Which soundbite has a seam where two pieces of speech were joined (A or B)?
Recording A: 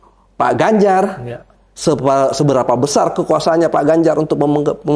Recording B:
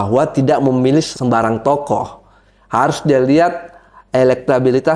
B